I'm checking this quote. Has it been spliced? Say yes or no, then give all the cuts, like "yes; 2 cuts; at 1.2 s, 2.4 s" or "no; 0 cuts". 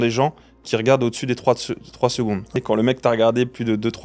yes; 1 cut; at 2.6 s